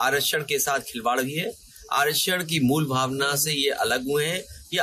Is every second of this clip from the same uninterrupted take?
yes; 0 cuts

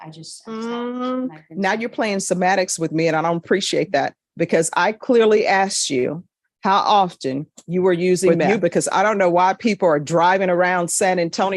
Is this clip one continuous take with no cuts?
no; 1 cut; at 8.4 s

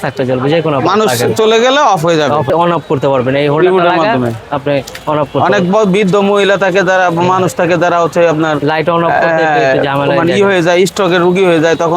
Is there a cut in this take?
yes; 1 cut; at 2.5 s

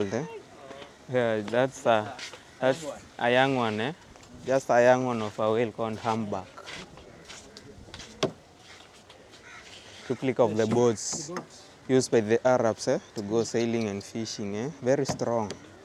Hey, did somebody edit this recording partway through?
no; 0 cuts

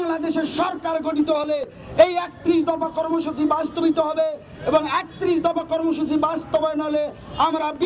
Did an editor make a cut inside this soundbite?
no; 0 cuts

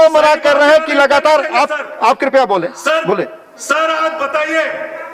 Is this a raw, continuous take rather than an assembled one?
yes; 0 cuts

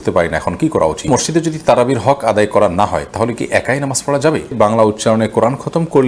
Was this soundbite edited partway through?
yes; 2 cuts; at 1.1 s, 4.5 s

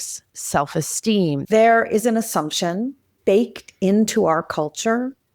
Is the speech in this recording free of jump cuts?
no; 2 cuts; at 1.4 s, 3.1 s

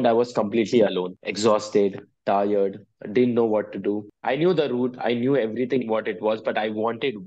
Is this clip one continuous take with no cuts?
no; 2 cuts; at 1.2 s, 4.1 s

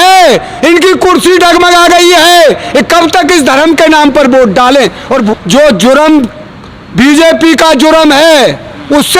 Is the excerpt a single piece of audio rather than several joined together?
no; 1 cut; at 5.3 s

